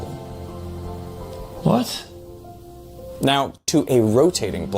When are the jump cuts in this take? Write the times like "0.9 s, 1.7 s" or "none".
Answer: 3.7 s